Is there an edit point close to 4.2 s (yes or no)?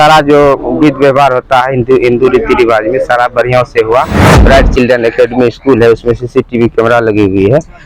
yes